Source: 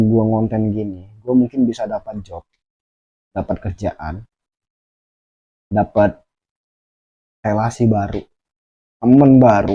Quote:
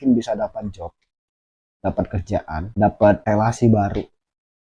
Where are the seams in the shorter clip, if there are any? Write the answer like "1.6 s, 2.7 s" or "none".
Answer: 2.7 s, 3.2 s